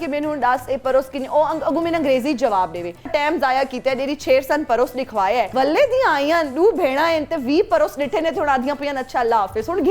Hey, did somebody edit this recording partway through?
yes; 2 cuts; at 3.1 s, 5.5 s

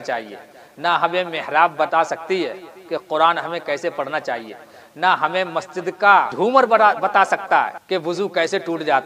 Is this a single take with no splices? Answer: no; 2 cuts; at 6.3 s, 7.8 s

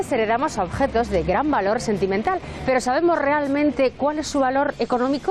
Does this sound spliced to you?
no; 0 cuts

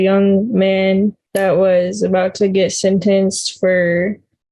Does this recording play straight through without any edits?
no; 1 cut; at 1.2 s

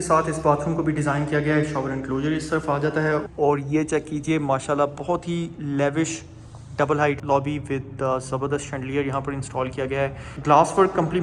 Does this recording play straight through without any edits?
no; 3 cuts; at 3.3 s, 7.2 s, 10.3 s

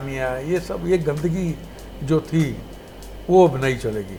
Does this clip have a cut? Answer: no; 0 cuts

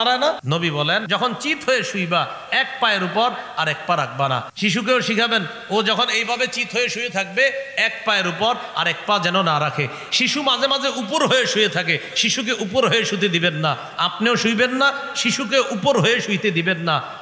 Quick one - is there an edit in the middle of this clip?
yes; 2 cuts; at 0.9 s, 4.5 s

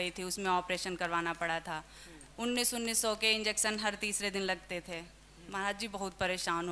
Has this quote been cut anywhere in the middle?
no; 0 cuts

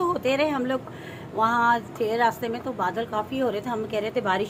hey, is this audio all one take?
yes; 0 cuts

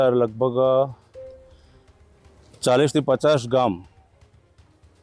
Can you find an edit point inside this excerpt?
no; 0 cuts

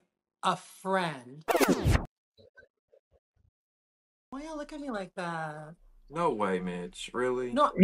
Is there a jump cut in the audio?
no; 0 cuts

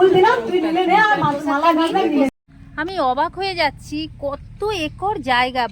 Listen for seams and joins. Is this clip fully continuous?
no; 1 cut; at 2.3 s

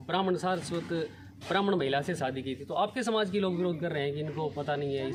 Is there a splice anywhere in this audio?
no; 0 cuts

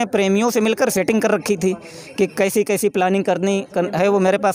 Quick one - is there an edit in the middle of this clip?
no; 0 cuts

